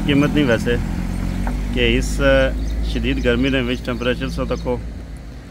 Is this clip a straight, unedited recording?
yes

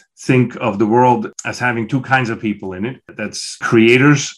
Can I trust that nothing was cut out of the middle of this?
no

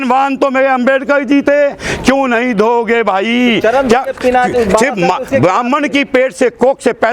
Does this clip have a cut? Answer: no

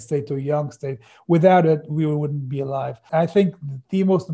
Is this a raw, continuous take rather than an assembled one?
no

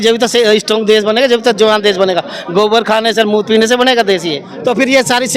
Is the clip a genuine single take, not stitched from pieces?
no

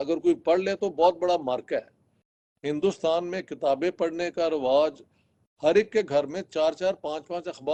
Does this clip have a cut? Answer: no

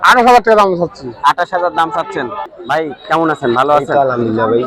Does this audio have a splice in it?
yes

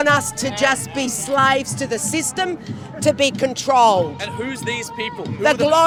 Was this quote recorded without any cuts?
yes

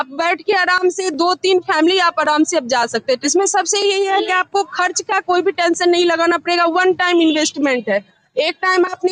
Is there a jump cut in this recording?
yes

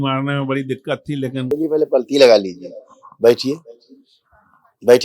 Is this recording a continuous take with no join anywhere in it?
no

